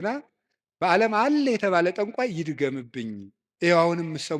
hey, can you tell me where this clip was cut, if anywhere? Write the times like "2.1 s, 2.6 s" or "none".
3.4 s